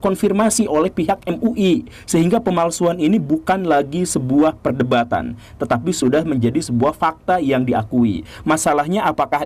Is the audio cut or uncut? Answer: uncut